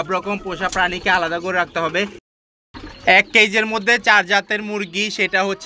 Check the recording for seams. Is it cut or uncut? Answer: cut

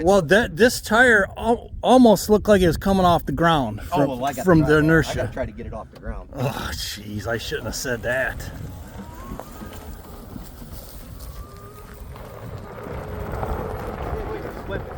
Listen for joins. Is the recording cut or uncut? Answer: uncut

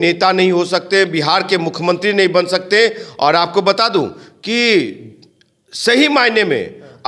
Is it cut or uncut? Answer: uncut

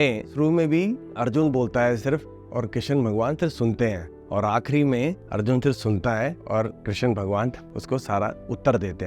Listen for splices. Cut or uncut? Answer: uncut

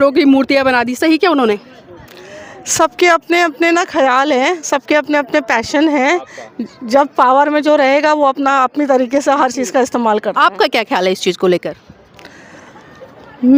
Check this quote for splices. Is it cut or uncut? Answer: uncut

